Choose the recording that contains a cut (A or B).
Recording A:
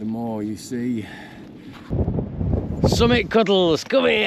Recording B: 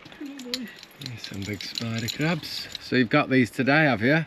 A